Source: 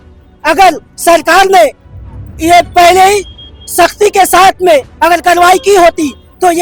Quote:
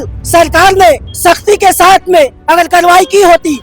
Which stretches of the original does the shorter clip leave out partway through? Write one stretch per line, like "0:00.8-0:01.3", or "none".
0:01.8-0:03.6